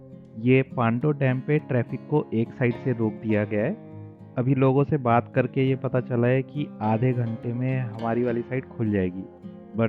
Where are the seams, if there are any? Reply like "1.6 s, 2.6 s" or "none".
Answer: none